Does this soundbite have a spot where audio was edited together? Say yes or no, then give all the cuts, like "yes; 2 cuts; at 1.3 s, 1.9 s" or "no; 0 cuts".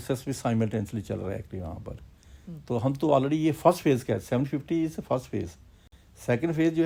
no; 0 cuts